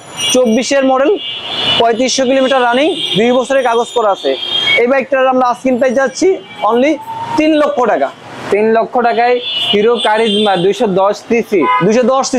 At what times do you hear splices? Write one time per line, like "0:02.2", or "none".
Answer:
none